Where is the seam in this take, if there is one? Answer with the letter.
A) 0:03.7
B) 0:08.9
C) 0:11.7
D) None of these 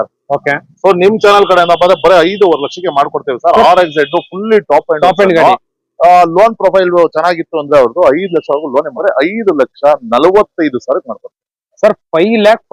B